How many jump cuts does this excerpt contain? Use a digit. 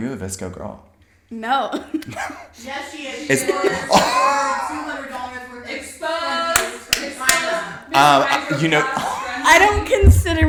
0